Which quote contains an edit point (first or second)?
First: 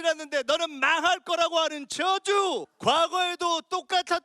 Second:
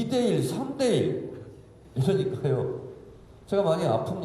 first